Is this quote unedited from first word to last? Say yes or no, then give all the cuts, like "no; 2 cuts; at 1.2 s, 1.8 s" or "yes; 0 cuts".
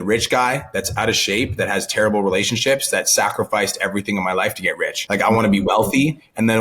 no; 1 cut; at 5.0 s